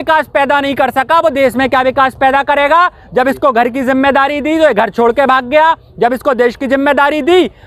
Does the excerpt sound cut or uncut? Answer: uncut